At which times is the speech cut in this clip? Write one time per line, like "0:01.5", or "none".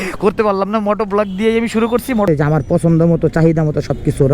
0:02.3